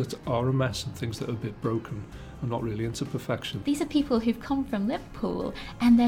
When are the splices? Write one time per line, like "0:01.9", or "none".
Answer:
0:03.5